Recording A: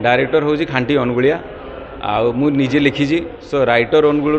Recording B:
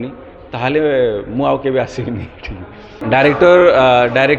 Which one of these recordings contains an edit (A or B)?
B